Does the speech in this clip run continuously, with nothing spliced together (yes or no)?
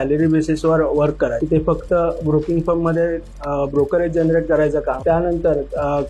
no